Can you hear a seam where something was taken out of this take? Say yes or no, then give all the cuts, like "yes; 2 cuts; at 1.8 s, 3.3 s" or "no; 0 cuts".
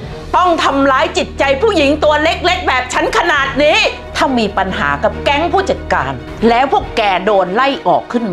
yes; 2 cuts; at 4.0 s, 6.2 s